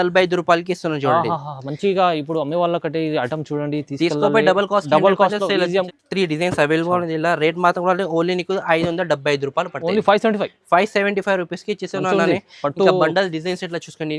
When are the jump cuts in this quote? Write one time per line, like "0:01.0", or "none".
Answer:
0:05.9